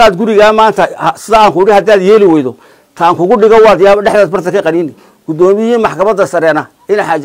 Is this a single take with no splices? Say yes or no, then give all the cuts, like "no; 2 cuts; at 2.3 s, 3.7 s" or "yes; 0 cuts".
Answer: yes; 0 cuts